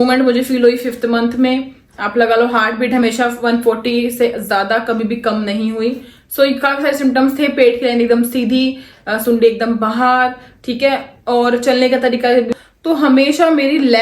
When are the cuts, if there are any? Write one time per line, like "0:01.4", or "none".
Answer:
0:12.5